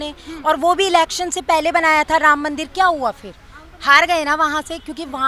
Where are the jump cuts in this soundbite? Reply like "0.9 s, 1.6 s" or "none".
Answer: none